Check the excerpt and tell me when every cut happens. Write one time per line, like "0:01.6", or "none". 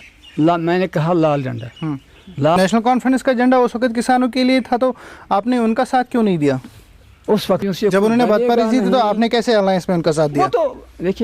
0:02.6
0:07.6